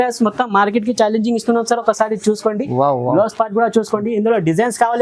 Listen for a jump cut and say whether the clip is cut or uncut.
uncut